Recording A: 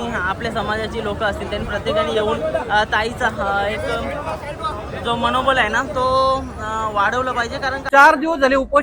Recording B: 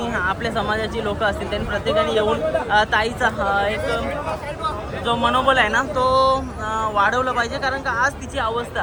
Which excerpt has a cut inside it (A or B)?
A